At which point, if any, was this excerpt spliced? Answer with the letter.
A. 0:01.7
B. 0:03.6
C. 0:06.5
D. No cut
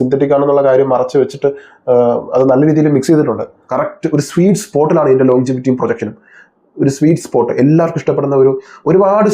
B